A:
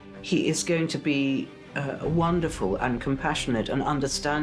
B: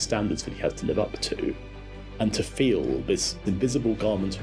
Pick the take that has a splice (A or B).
B